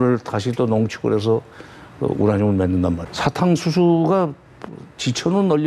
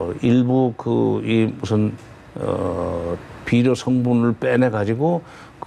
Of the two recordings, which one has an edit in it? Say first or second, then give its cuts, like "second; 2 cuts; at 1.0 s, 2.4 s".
first; 1 cut; at 3.1 s